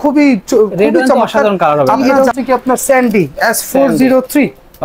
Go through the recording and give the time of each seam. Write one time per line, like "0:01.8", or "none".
0:02.1